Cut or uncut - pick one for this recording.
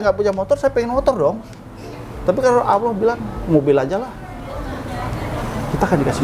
uncut